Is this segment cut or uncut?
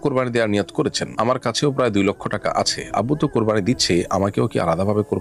uncut